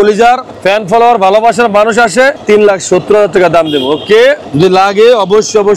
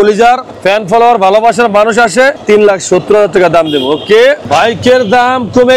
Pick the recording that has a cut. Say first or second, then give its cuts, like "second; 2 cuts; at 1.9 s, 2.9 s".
second; 1 cut; at 4.5 s